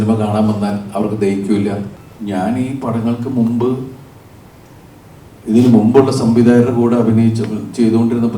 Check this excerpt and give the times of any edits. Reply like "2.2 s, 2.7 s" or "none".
2.0 s